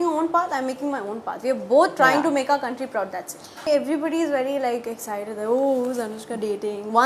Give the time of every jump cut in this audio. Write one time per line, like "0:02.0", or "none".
0:03.5